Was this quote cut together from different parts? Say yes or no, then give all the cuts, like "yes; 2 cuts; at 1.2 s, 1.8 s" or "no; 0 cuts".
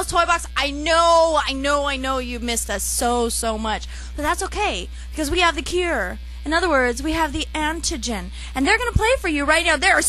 no; 0 cuts